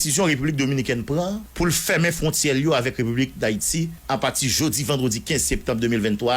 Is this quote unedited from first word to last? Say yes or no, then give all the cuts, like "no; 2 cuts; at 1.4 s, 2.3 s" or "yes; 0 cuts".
no; 2 cuts; at 1.5 s, 4.0 s